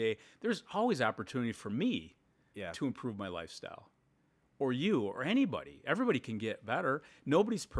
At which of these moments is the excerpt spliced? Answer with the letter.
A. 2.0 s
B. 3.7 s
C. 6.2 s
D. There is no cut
D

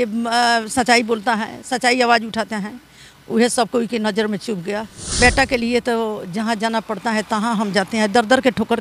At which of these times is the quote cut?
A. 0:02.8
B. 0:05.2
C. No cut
B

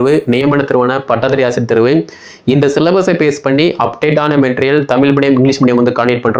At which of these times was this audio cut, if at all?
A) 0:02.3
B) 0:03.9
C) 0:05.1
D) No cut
D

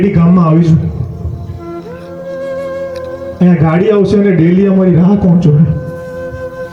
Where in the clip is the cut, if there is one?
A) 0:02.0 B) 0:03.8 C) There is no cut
C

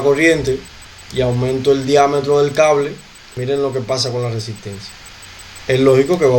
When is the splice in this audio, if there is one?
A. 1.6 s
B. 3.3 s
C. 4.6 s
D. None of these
B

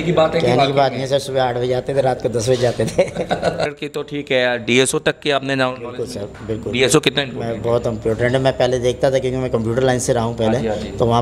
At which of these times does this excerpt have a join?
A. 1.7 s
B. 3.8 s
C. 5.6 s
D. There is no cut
B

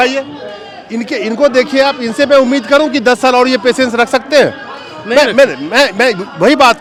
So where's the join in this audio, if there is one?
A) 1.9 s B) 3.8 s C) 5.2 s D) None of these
D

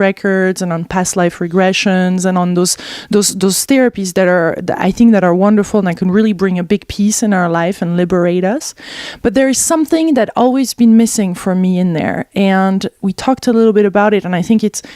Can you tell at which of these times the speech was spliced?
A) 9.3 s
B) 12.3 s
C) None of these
A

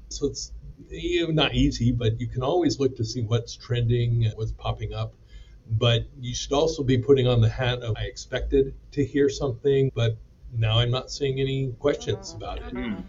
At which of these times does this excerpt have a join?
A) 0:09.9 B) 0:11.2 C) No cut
A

